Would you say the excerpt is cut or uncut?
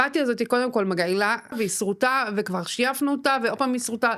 cut